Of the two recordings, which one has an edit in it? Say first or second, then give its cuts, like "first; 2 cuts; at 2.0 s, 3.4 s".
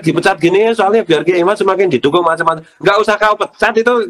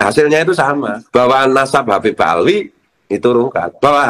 second; 1 cut; at 0.9 s